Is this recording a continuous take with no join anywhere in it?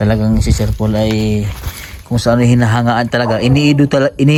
yes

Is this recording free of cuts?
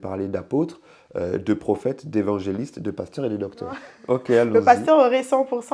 no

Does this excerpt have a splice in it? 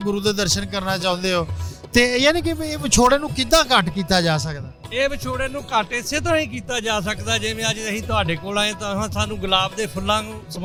no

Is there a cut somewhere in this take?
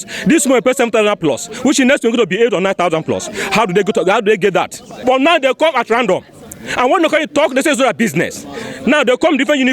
yes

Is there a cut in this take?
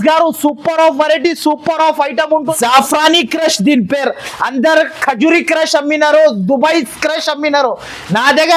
yes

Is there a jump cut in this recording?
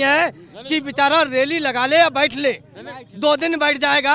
no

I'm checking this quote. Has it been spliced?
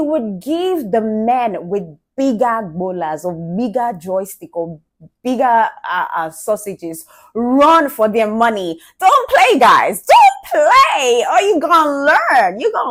no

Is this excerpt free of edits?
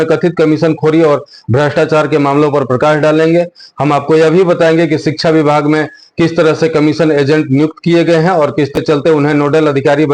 no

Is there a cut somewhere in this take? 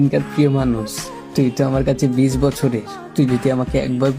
no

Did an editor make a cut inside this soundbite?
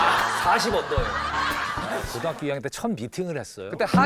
yes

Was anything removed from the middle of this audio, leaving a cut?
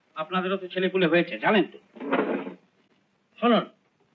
no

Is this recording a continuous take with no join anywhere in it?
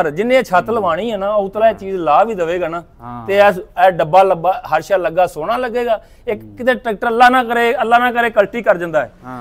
yes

